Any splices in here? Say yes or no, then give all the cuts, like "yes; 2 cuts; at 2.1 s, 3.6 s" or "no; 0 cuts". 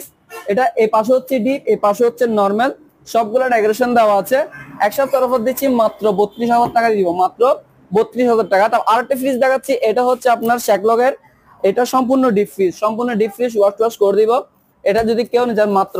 no; 0 cuts